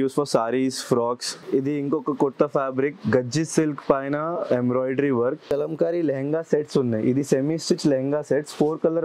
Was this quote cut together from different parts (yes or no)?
yes